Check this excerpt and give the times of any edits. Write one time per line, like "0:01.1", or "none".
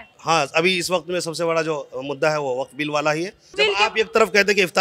0:03.5